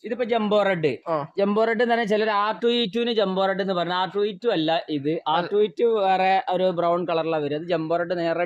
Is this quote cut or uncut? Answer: uncut